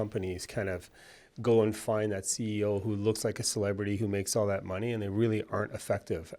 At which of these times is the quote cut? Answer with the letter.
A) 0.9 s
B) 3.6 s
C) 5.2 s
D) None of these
D